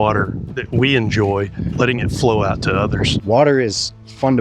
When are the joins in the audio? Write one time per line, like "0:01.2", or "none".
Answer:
0:01.7
0:03.2